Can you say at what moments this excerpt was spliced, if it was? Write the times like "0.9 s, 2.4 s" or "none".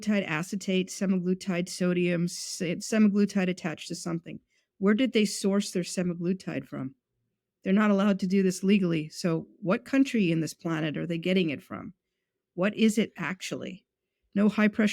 2.7 s